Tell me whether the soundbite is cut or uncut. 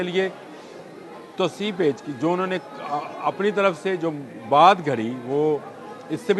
uncut